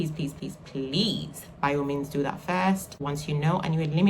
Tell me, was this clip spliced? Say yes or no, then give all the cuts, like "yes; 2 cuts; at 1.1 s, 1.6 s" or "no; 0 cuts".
yes; 1 cut; at 2.9 s